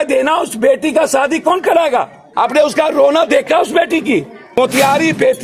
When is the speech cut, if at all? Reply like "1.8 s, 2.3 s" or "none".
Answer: 2.2 s, 4.4 s